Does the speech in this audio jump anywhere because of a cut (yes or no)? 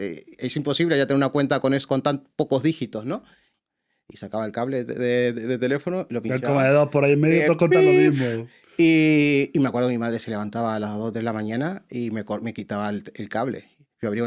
yes